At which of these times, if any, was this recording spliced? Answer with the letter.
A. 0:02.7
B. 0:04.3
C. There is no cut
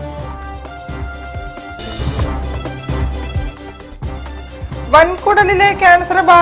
B